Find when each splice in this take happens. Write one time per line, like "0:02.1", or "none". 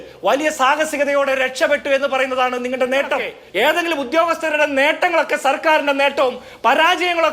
0:03.4